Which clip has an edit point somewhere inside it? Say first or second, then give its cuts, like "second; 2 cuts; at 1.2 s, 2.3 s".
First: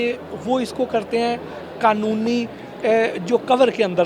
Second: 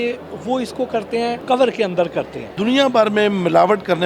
second; 2 cuts; at 1.4 s, 2.4 s